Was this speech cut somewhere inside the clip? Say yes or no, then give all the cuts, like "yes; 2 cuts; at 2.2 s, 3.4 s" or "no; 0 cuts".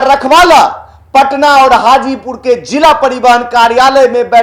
no; 0 cuts